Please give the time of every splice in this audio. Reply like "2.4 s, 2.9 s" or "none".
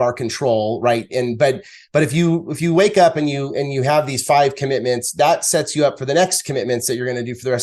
none